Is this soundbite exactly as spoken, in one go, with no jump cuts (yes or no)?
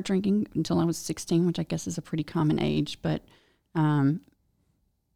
yes